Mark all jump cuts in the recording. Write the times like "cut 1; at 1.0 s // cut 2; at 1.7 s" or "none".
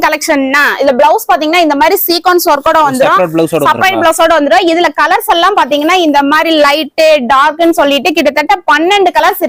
none